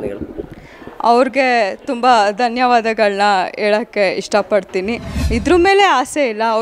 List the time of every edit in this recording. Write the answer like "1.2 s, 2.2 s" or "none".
5.1 s